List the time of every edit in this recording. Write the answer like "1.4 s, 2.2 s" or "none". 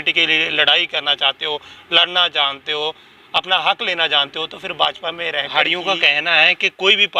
5.5 s